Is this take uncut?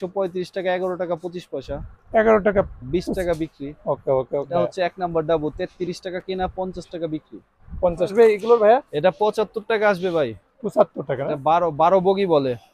no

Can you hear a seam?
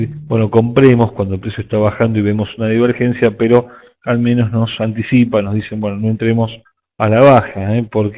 yes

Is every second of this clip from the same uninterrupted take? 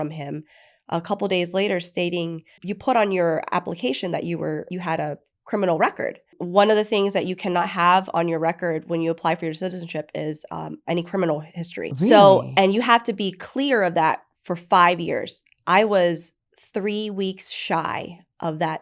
no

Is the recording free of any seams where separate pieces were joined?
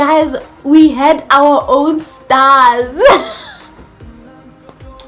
yes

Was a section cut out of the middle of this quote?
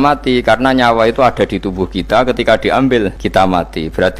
yes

